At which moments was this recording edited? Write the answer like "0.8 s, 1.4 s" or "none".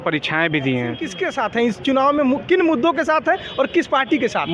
1.1 s